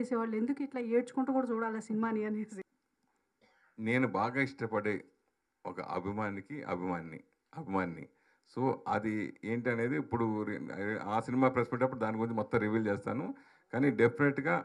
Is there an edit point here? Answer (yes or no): yes